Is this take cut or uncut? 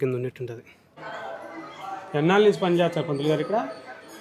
cut